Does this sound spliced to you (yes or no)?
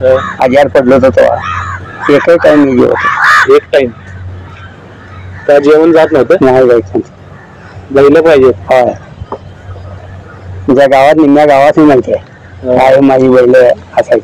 no